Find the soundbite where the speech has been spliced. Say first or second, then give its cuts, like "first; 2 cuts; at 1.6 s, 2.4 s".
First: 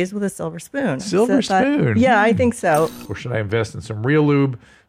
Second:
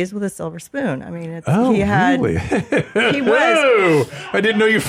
first; 2 cuts; at 1.1 s, 2.9 s